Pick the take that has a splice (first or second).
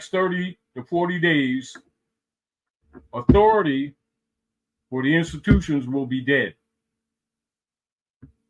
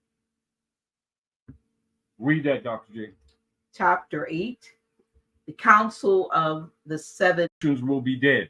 second